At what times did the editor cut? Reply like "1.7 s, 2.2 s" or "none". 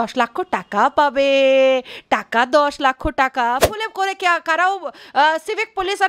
3.6 s